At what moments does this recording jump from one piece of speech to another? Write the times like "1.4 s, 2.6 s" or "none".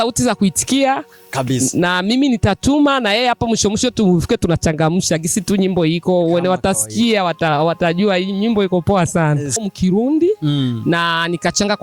9.6 s